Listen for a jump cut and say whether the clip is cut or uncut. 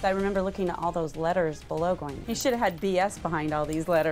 cut